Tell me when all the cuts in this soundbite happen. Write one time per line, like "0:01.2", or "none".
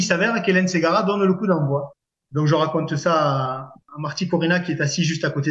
none